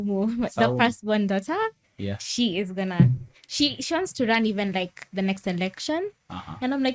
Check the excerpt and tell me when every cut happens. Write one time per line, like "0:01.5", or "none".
none